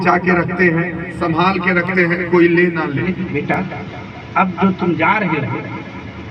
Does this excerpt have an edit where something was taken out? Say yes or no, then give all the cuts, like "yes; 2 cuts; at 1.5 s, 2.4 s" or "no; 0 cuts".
yes; 1 cut; at 3.5 s